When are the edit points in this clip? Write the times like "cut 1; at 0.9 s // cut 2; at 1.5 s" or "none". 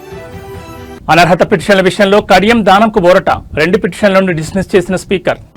cut 1; at 0.9 s